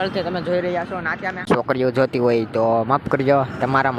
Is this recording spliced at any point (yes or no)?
yes